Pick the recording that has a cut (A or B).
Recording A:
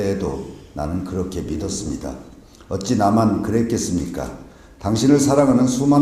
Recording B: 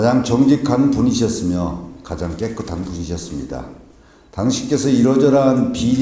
A